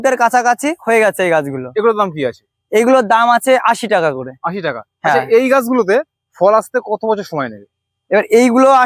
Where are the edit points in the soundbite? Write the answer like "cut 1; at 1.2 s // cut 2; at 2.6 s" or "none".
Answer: none